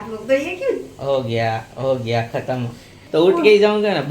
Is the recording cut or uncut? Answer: cut